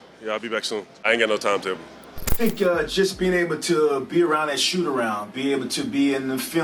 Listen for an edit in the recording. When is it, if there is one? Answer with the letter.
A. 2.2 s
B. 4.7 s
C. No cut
A